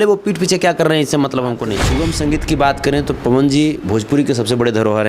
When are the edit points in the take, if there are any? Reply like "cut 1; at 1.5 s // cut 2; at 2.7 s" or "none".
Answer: cut 1; at 1.8 s